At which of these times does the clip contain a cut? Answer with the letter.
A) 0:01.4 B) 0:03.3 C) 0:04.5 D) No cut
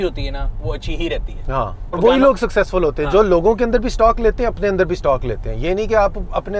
D